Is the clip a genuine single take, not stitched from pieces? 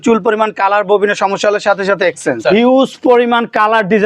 no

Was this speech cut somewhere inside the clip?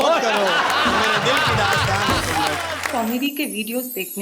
yes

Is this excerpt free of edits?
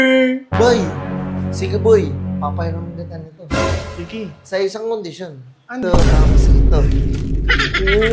no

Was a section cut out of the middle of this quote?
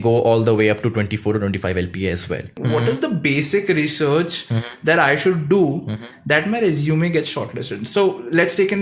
yes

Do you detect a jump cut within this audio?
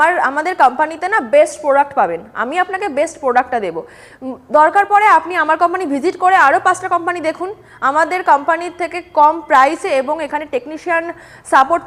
no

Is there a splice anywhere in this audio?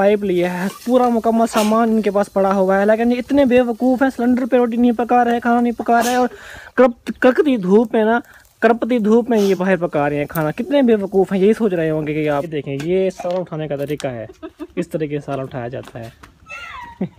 yes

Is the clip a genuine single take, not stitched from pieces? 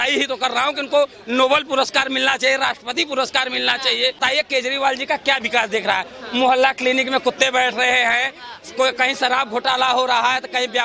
no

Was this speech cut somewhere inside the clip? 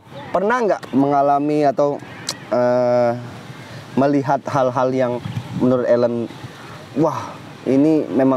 no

